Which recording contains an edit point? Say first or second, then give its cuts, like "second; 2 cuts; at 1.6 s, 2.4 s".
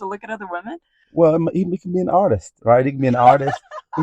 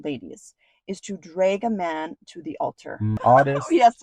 second; 1 cut; at 3.1 s